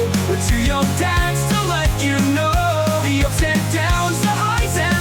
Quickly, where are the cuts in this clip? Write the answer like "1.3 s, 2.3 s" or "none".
none